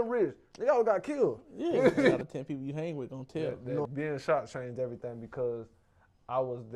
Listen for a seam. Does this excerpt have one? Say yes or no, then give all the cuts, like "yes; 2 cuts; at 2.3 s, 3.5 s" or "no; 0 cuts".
yes; 2 cuts; at 2.2 s, 3.8 s